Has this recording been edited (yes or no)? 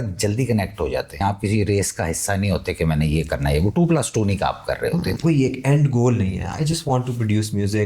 yes